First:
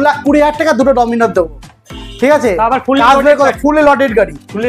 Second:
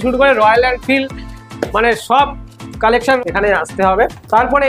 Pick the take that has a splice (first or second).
second